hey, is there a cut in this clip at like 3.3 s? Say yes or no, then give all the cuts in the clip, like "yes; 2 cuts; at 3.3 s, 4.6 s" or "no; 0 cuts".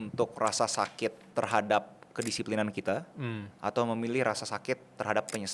no; 1 cut; at 1.2 s